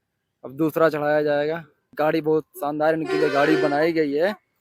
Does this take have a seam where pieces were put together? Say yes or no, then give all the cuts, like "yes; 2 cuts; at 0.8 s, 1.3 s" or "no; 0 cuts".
yes; 1 cut; at 1.8 s